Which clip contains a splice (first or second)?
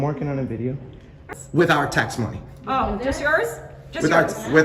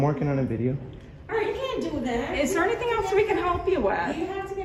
first